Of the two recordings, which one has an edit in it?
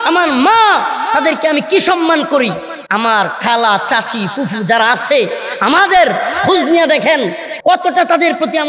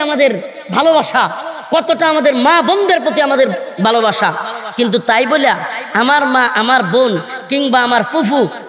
first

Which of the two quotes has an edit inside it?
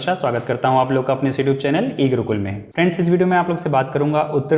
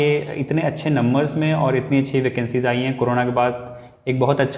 first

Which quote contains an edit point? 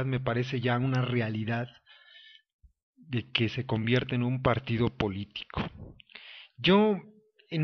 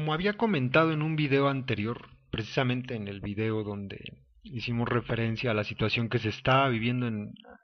second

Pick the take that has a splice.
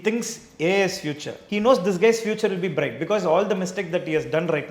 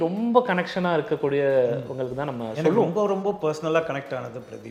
first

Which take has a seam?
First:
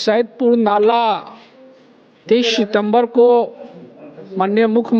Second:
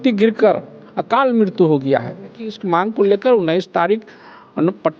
second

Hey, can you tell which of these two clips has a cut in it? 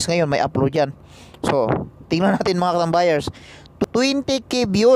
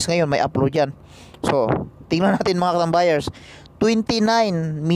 first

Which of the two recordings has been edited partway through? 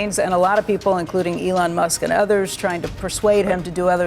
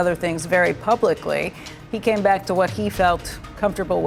first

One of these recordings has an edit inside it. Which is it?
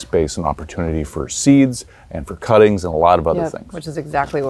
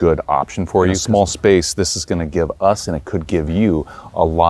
second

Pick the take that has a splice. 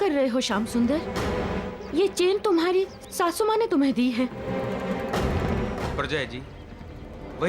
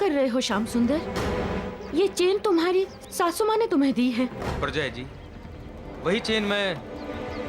second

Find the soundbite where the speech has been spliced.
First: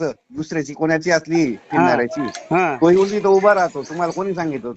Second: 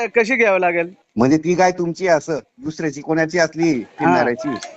second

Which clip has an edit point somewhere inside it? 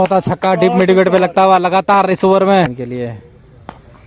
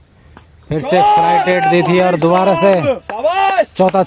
first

